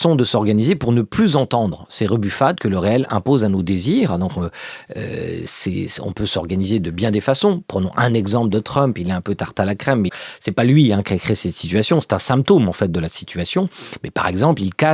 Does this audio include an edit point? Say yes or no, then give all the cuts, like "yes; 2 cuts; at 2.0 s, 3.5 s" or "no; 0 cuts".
yes; 1 cut; at 10.1 s